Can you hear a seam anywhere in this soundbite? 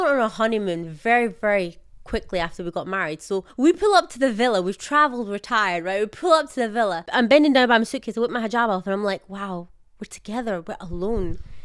yes; 2 cuts; at 3.5 s, 7.1 s

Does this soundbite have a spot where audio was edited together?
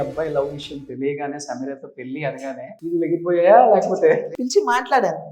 yes; 2 cuts; at 2.7 s, 4.3 s

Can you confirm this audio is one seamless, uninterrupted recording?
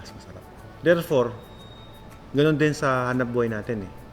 yes; 0 cuts

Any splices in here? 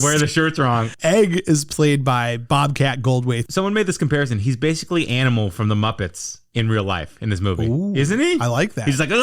yes; 2 cuts; at 0.9 s, 3.4 s

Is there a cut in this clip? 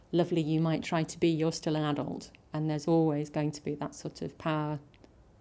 no; 0 cuts

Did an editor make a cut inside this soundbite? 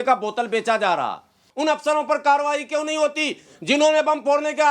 yes; 1 cut; at 1.4 s

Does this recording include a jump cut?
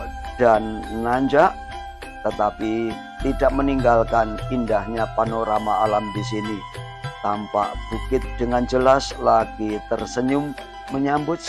no; 0 cuts

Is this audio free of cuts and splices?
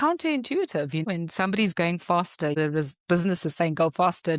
no; 2 cuts; at 1.1 s, 2.5 s

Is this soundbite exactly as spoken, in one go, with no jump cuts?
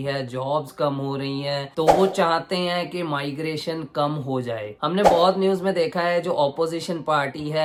yes; 0 cuts

